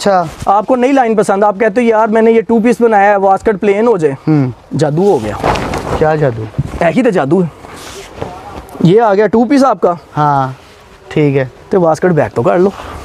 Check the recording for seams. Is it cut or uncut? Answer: uncut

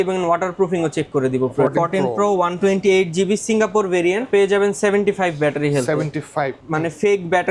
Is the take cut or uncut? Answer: cut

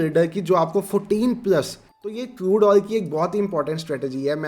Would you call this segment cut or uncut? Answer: cut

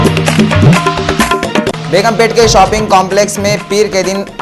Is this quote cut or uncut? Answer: cut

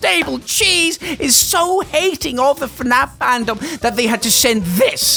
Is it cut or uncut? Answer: uncut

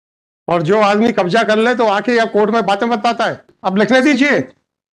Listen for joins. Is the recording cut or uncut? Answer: cut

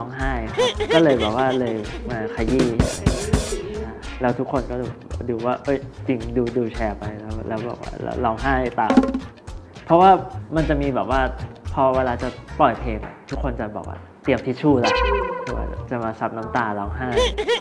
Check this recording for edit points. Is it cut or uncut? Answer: uncut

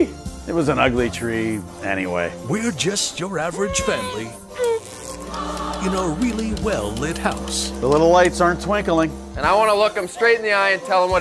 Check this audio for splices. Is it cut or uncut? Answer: uncut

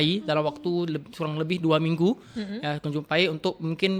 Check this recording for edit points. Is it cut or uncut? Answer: uncut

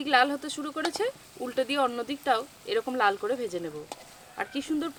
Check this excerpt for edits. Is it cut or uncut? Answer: uncut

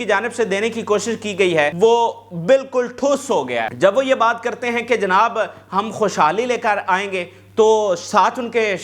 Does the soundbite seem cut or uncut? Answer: cut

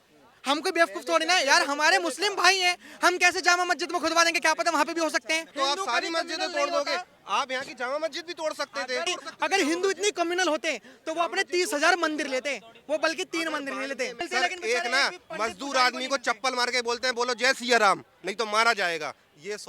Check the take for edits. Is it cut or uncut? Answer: cut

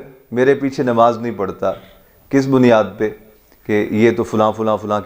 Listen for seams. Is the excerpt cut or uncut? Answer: uncut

